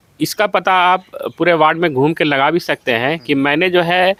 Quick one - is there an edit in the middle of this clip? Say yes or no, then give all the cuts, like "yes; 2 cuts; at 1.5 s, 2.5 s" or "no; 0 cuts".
no; 0 cuts